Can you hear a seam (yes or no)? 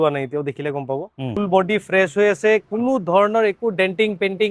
yes